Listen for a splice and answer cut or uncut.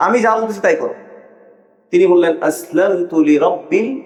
uncut